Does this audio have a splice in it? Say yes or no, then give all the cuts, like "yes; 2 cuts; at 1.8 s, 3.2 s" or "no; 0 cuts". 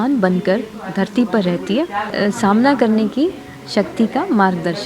yes; 1 cut; at 2.1 s